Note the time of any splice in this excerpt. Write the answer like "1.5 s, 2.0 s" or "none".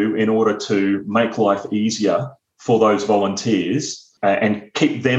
4.0 s